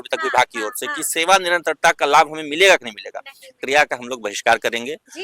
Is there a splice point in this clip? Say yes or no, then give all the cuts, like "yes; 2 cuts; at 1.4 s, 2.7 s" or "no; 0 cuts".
yes; 1 cut; at 3.6 s